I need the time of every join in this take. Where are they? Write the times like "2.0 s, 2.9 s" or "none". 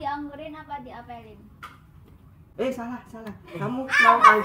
none